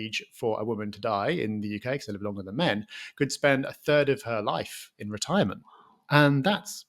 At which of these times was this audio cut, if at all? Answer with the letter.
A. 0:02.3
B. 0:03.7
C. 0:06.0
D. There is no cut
D